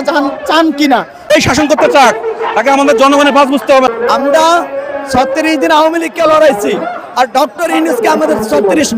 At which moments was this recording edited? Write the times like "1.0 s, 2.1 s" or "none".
1.3 s, 3.9 s